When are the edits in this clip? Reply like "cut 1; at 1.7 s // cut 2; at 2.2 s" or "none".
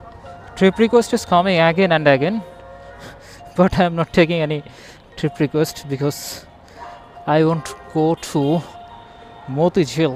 none